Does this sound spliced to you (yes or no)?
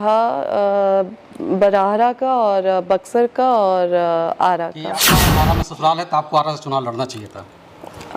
yes